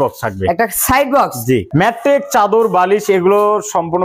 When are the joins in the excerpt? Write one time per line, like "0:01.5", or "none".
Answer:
0:01.7